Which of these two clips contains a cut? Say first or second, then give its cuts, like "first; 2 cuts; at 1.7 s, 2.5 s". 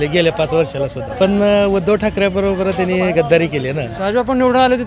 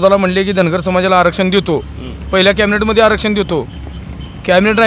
first; 2 cuts; at 1.0 s, 3.9 s